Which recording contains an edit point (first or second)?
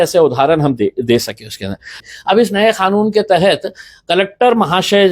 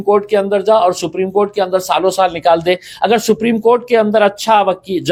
first